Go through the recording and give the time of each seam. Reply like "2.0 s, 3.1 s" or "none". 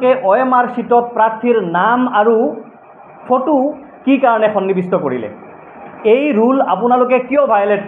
none